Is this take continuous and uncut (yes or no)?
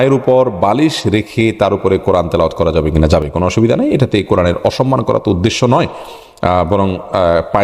yes